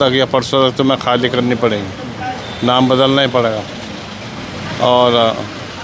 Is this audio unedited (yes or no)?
yes